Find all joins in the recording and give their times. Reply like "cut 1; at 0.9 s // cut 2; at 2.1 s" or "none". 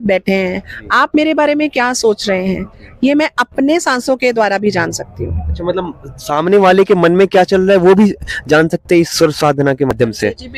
none